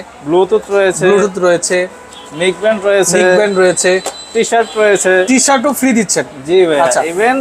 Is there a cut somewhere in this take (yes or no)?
no